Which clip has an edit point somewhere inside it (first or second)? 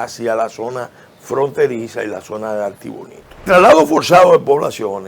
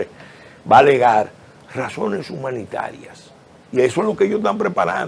first